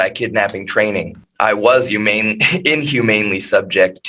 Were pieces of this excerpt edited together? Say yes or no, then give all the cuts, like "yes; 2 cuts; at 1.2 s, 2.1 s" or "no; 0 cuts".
yes; 1 cut; at 1.2 s